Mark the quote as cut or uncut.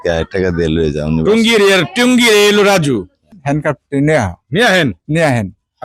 cut